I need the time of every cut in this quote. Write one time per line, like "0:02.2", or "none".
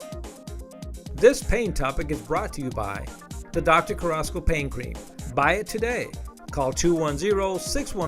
0:01.2